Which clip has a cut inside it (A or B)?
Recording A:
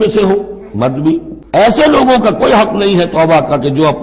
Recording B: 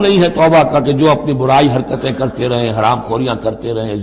A